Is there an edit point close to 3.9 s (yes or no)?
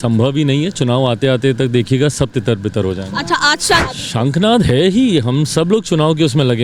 yes